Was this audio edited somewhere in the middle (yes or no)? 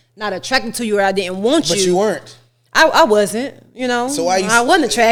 no